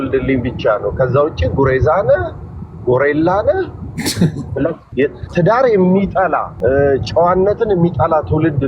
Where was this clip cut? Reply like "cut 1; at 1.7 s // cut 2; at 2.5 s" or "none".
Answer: cut 1; at 4.8 s // cut 2; at 6.5 s